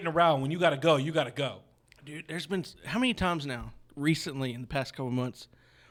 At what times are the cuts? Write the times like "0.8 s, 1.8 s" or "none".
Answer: none

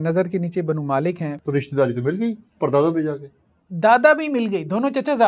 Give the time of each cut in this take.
1.3 s

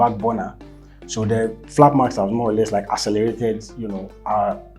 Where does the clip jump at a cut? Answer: none

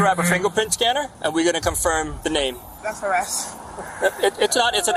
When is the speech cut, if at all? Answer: 1.1 s, 2.4 s

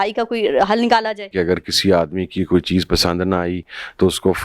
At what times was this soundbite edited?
1.3 s

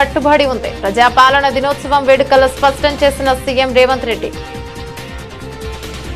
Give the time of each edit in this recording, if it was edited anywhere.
4.3 s

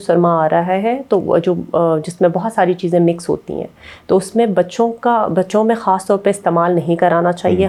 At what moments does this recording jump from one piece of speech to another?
none

